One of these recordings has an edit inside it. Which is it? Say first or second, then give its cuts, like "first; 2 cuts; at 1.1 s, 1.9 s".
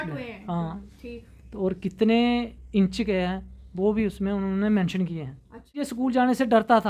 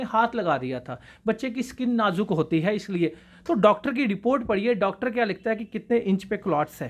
first; 1 cut; at 5.9 s